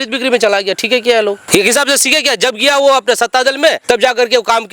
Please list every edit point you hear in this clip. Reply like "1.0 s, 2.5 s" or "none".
1.4 s, 3.8 s